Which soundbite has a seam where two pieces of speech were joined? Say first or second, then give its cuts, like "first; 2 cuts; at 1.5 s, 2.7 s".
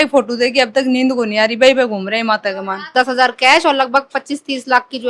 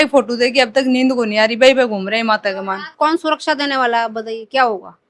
first; 1 cut; at 2.9 s